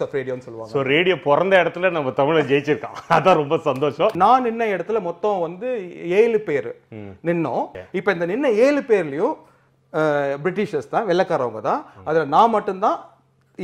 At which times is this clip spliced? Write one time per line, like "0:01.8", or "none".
0:04.1
0:07.8